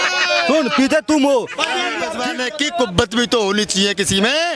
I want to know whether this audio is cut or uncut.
cut